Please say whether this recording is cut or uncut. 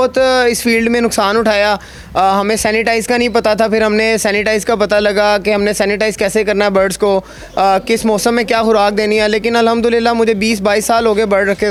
uncut